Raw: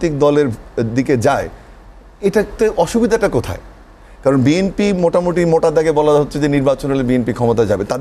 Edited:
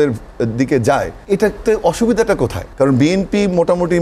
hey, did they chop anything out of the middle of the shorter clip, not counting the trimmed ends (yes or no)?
yes